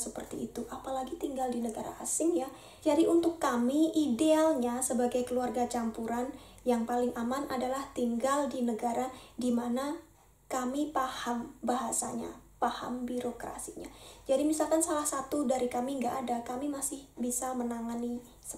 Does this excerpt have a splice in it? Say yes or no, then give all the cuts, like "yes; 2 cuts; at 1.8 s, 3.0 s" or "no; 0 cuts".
no; 0 cuts